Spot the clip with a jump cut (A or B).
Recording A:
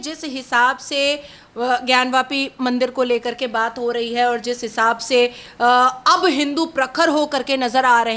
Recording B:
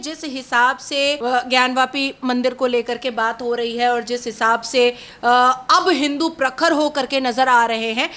B